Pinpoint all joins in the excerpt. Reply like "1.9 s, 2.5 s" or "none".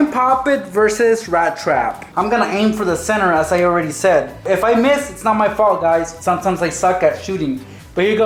none